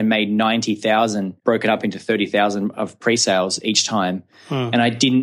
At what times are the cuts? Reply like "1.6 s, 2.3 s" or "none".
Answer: 1.3 s